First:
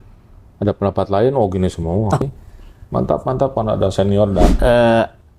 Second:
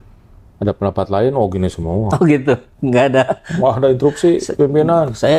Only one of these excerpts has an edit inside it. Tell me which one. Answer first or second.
first